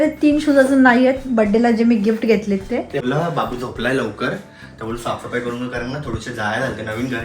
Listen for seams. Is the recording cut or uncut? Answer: cut